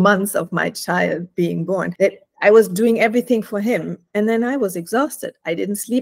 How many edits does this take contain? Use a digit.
1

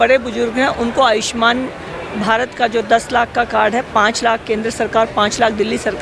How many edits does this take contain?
0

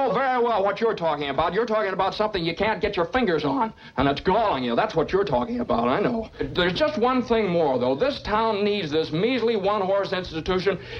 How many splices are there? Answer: 1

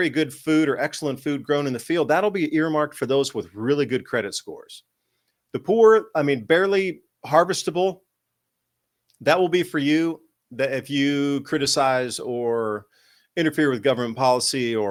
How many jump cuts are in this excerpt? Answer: 0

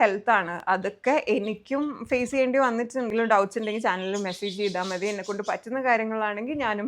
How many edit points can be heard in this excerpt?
1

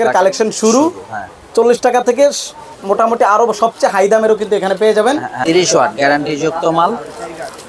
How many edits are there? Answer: 1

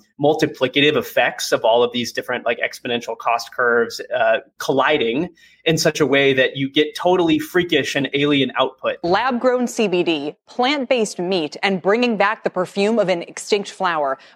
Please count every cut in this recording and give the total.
1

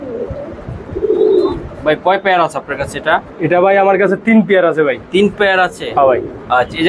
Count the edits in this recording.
0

